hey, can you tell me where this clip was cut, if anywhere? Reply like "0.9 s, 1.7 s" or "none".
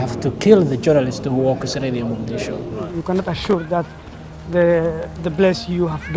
2.9 s